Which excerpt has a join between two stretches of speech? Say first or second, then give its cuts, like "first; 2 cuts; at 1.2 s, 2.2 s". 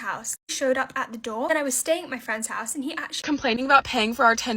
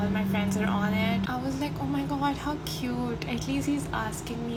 first; 1 cut; at 3.2 s